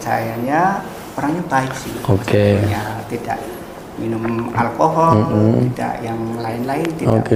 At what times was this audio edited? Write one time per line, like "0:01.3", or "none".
none